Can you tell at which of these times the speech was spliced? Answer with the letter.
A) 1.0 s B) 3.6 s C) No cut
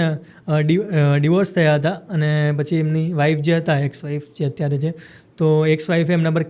C